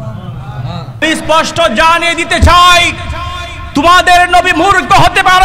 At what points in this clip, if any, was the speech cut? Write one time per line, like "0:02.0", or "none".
0:01.0